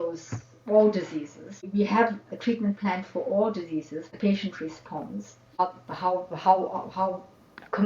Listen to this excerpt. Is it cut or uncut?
cut